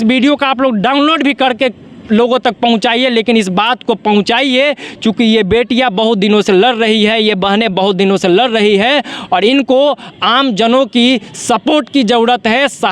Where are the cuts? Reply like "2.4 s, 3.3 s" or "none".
none